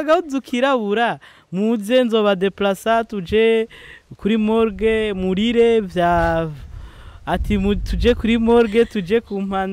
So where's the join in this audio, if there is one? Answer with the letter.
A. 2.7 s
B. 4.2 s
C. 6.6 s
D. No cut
D